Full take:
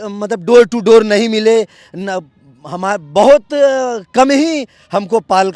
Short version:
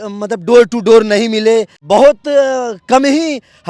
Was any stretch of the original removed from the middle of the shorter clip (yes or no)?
yes